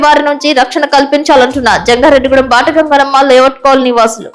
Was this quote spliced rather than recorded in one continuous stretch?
no; 0 cuts

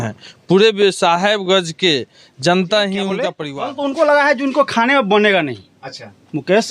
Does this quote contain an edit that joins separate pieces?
yes; 1 cut; at 3.4 s

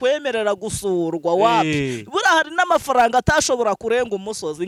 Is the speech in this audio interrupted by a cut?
no; 0 cuts

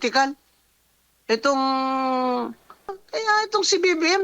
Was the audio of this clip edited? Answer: yes; 1 cut; at 3.0 s

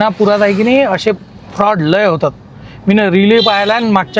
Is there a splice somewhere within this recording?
no; 0 cuts

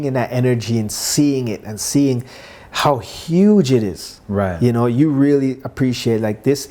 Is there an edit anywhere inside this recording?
no; 0 cuts

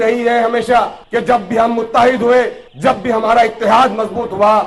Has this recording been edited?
yes; 2 cuts; at 1.0 s, 2.6 s

